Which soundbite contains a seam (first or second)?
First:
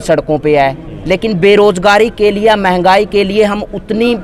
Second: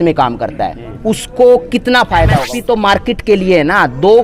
second